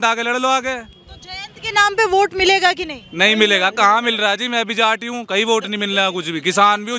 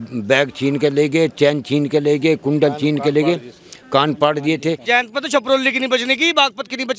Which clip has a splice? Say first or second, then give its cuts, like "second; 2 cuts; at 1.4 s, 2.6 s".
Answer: second; 1 cut; at 4.9 s